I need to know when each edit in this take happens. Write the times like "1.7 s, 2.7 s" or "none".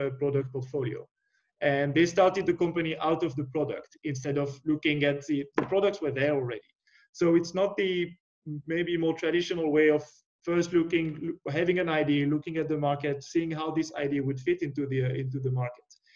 none